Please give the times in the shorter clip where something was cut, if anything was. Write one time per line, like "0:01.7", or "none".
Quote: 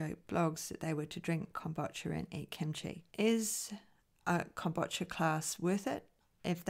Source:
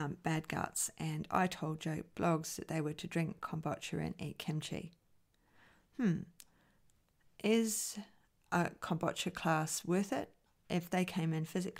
0:03.0